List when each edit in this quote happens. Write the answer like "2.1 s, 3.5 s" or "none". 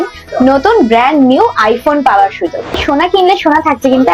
2.8 s